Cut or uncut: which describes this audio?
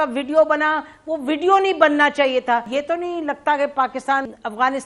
cut